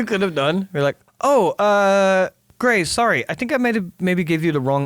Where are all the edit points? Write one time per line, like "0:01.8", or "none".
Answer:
0:01.1
0:02.4